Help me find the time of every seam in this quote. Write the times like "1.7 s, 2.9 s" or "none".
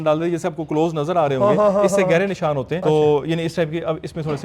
2.7 s